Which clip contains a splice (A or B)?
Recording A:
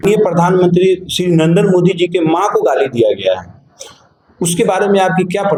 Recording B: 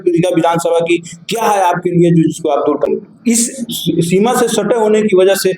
B